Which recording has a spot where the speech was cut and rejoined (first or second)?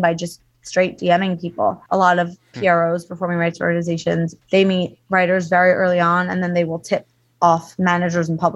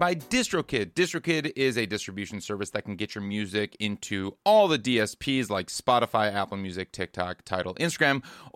first